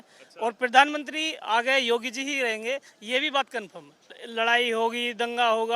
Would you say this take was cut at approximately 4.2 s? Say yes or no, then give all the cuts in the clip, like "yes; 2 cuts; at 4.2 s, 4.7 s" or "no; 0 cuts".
yes; 1 cut; at 4.2 s